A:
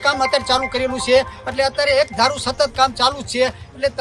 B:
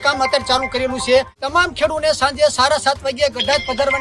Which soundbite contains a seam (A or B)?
B